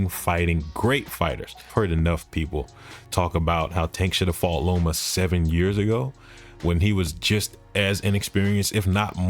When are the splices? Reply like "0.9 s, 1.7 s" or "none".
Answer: 1.6 s